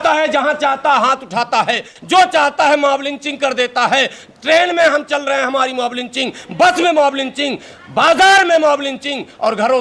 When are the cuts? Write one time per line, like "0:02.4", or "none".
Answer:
none

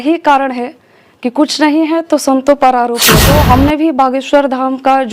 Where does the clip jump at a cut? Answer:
0:03.2

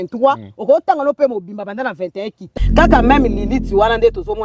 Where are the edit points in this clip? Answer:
0:02.4

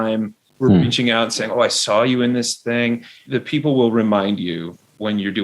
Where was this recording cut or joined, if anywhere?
0:03.1

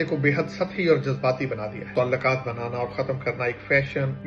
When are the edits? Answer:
0:01.9

